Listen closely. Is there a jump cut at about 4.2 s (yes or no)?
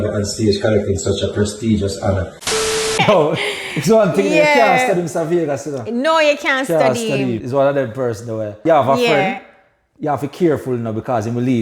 no